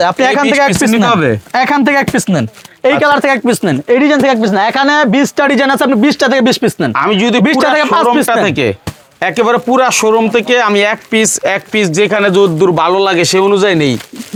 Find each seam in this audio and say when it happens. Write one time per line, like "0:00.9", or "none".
none